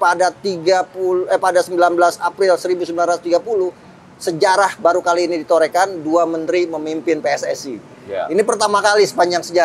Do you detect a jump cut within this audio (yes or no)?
no